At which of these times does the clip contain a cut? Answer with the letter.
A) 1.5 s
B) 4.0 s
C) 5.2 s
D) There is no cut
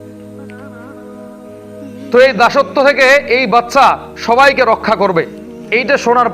A